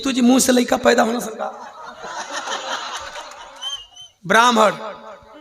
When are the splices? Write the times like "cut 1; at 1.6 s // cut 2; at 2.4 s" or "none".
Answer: cut 1; at 3.6 s